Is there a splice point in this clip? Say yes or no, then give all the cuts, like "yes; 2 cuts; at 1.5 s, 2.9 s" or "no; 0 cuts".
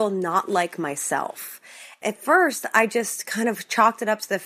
no; 0 cuts